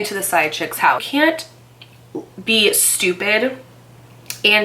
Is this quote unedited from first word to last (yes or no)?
no